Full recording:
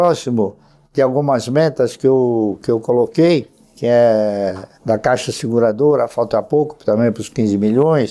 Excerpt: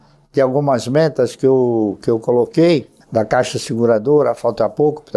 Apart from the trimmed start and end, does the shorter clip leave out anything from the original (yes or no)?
yes